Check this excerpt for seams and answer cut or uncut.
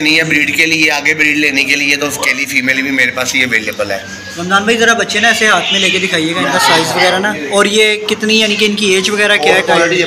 uncut